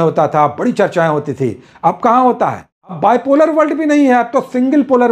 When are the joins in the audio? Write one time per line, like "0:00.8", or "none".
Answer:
0:03.0